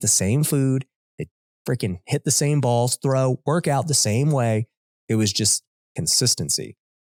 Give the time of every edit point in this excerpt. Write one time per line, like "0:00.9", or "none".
none